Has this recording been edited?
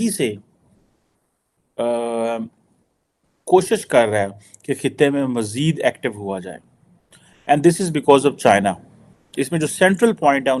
no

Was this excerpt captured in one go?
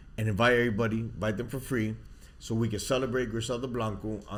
yes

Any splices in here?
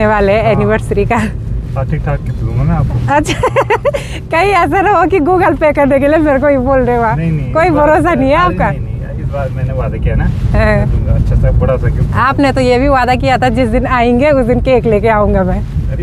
no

